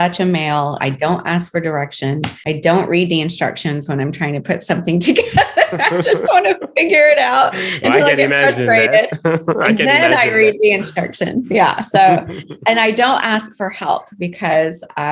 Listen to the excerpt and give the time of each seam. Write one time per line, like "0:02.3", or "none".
0:00.8
0:02.3